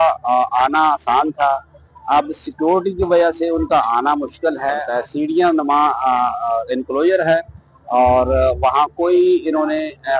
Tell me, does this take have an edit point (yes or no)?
yes